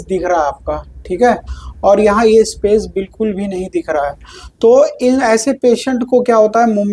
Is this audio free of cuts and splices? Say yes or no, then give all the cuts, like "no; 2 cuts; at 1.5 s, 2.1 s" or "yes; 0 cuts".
yes; 0 cuts